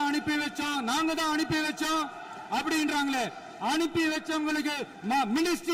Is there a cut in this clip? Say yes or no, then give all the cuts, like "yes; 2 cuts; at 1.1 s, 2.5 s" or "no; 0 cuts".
no; 0 cuts